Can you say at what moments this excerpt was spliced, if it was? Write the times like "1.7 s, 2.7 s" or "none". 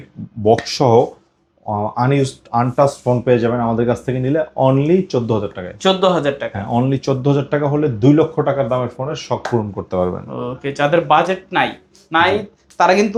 none